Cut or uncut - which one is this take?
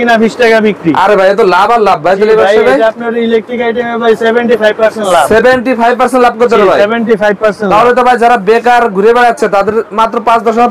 uncut